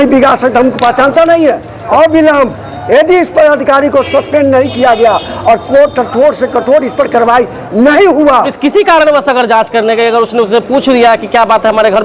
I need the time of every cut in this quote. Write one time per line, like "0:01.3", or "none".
0:01.7
0:08.5